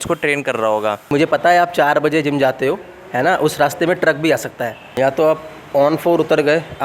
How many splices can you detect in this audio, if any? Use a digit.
2